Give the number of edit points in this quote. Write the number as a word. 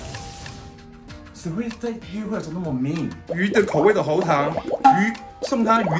one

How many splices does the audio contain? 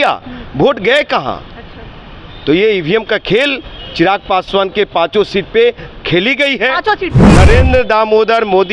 one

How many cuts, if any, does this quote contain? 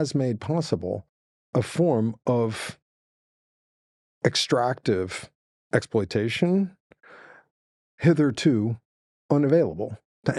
zero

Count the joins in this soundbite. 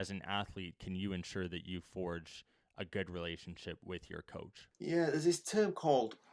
one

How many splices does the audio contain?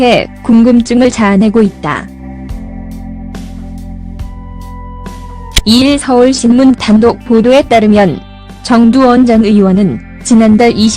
one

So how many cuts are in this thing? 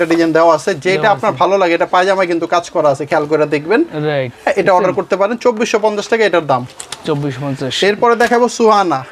zero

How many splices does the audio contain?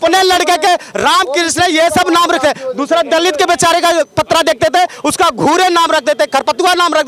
zero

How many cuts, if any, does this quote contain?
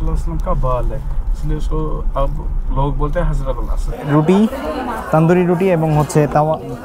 one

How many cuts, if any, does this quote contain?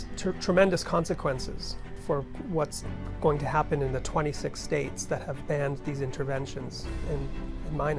two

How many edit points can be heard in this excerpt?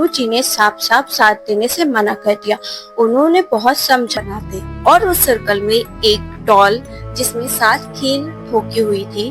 one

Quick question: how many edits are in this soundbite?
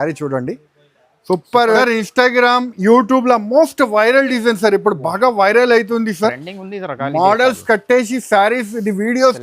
one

